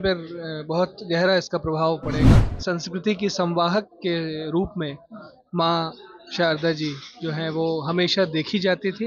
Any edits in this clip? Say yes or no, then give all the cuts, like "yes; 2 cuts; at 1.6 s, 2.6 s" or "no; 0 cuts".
yes; 1 cut; at 2.5 s